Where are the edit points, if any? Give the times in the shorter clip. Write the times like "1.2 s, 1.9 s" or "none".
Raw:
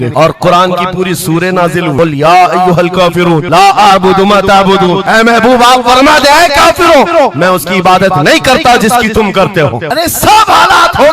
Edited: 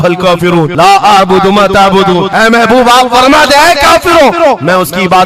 none